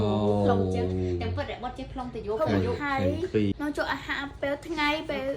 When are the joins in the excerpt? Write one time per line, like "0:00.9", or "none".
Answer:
0:03.5